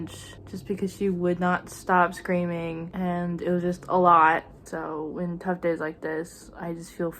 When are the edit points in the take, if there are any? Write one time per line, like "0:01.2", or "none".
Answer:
0:04.5